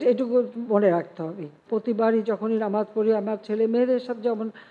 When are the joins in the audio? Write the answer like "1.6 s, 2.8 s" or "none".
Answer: 1.6 s